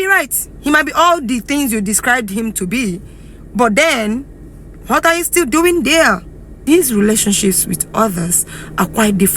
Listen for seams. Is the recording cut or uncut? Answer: cut